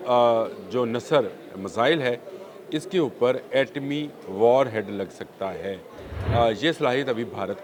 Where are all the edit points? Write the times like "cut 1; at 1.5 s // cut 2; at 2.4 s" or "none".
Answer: none